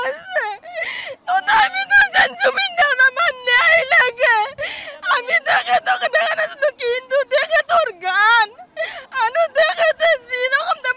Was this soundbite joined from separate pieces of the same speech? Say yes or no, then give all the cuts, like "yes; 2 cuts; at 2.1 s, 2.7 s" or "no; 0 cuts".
yes; 1 cut; at 1.0 s